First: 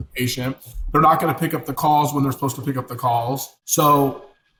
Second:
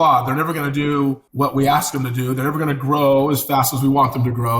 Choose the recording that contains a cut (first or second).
second